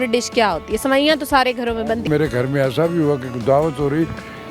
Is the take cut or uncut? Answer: cut